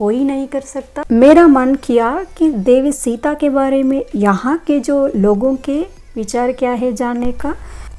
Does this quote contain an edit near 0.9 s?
yes; 1 cut; at 0.9 s

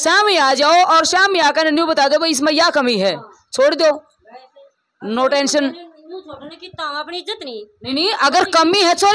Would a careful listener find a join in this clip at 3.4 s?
no; 0 cuts

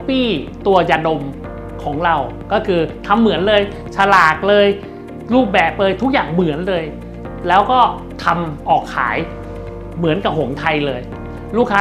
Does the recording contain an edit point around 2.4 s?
no; 0 cuts

